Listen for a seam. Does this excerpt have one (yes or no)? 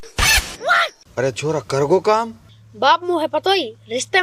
no